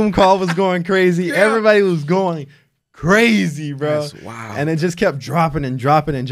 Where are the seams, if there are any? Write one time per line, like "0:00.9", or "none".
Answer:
none